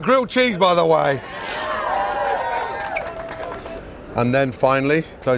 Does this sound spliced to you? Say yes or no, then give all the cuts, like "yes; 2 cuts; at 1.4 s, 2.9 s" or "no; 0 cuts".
no; 0 cuts